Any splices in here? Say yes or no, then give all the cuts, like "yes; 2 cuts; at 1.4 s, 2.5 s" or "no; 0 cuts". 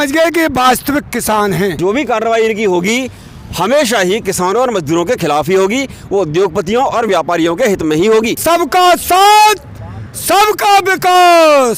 yes; 2 cuts; at 1.8 s, 8.4 s